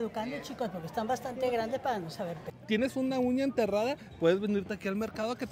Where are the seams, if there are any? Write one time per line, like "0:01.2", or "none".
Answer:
0:02.5